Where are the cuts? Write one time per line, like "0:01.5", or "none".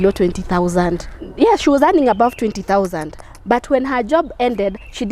0:01.1